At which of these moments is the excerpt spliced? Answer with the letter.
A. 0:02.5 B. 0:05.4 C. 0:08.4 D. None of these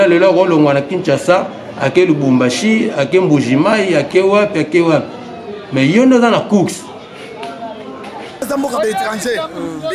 C